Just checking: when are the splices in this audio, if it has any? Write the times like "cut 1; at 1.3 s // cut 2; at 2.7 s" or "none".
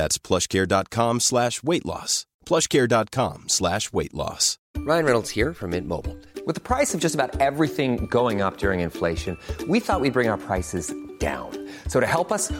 cut 1; at 4.7 s